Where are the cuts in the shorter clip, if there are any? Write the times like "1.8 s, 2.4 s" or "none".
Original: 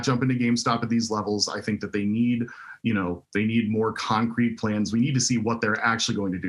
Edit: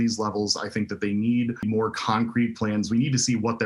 1.6 s